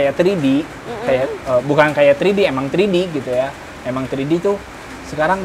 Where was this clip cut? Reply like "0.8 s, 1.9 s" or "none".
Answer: none

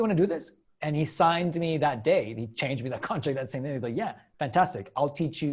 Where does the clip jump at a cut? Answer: none

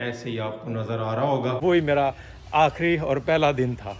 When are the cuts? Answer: 1.6 s

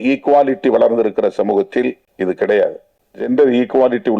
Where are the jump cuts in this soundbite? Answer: 2.1 s, 3.3 s

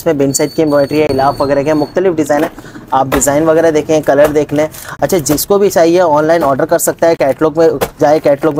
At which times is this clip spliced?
none

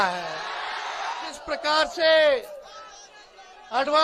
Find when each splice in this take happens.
1.3 s

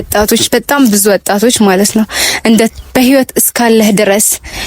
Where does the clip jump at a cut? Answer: 2.7 s

